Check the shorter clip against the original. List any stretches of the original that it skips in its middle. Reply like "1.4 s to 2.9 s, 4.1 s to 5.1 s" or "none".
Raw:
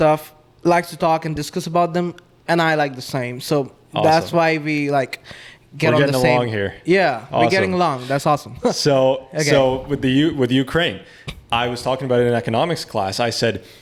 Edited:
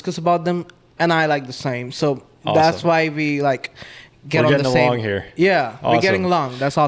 none